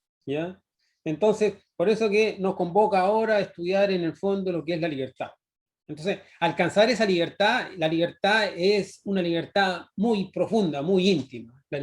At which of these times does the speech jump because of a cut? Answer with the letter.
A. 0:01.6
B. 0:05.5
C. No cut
B